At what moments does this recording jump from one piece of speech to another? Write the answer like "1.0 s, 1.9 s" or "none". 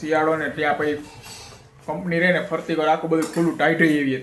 none